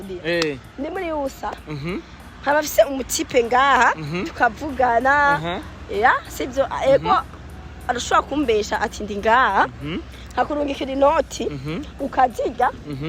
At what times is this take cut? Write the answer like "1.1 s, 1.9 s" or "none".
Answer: none

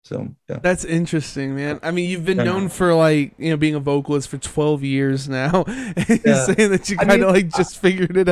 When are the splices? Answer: none

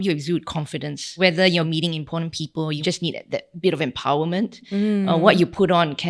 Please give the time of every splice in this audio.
1.0 s, 1.7 s

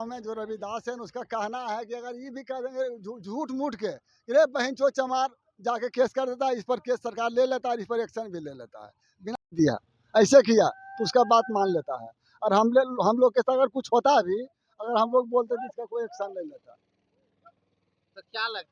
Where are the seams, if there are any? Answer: none

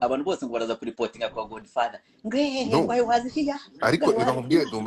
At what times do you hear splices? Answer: none

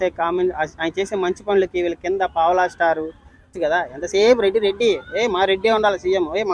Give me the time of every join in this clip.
3.5 s

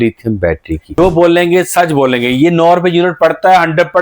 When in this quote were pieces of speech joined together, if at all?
1.0 s

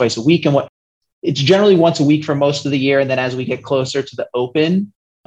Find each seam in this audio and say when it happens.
none

